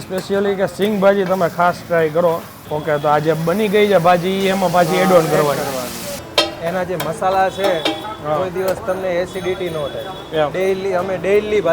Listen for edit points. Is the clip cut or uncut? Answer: cut